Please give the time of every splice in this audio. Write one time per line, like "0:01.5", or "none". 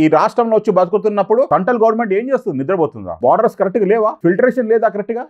0:01.5
0:03.0
0:04.2